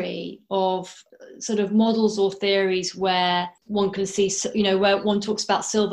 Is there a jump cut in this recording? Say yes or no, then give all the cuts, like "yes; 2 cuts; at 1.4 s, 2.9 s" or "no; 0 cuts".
yes; 2 cuts; at 1.0 s, 3.6 s